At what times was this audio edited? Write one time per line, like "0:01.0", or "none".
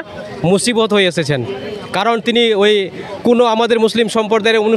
none